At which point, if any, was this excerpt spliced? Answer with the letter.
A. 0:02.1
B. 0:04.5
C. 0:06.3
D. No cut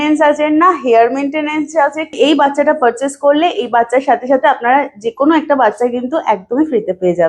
A